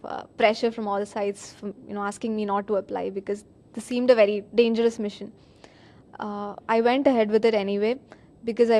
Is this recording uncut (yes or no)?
no